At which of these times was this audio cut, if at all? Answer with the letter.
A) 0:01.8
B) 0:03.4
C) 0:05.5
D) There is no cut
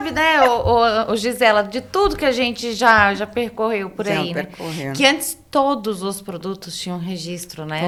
D